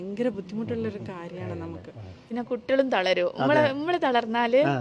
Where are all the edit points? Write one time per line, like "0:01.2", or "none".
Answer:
0:02.2